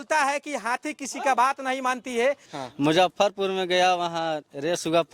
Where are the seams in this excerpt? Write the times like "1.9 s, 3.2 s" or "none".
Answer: 2.5 s